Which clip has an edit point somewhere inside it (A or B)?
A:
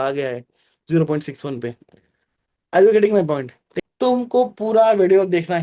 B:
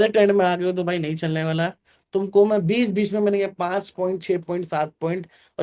A